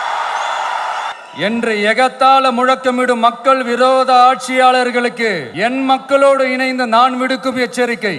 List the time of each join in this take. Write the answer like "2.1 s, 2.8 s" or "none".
1.1 s, 5.5 s